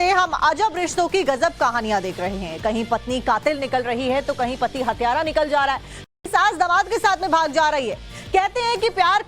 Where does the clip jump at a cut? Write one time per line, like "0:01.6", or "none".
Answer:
none